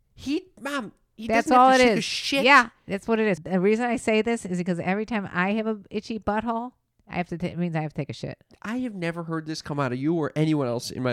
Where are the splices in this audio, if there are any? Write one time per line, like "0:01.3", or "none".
0:03.4